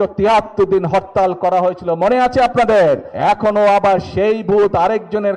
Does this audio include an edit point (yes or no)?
yes